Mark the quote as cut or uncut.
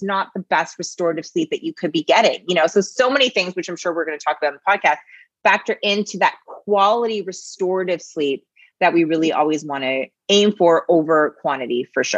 uncut